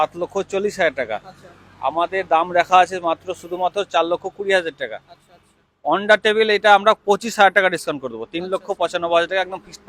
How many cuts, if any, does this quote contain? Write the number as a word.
zero